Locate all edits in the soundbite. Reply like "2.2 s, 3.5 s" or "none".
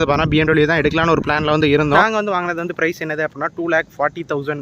1.9 s